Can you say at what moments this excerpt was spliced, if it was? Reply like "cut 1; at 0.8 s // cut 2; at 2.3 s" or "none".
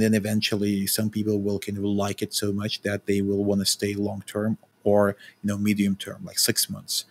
none